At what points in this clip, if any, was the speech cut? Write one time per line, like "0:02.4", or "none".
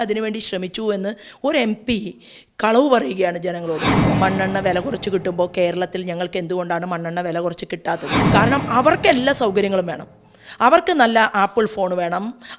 0:04.0
0:08.2